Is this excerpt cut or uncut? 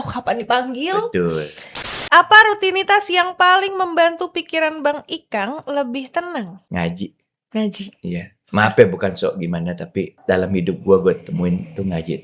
cut